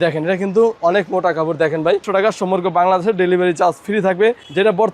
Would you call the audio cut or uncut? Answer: cut